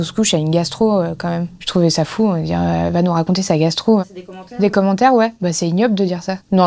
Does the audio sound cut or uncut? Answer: uncut